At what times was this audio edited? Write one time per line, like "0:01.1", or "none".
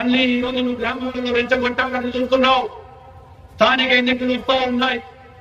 none